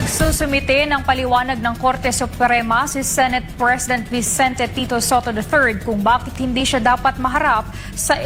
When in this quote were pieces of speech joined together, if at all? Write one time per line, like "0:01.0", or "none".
none